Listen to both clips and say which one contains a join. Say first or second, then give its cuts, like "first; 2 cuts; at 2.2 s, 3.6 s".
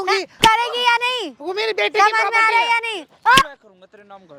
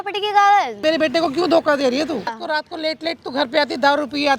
second; 2 cuts; at 0.8 s, 2.4 s